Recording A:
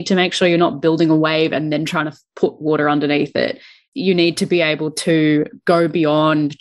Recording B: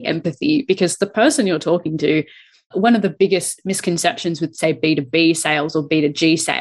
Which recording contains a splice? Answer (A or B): A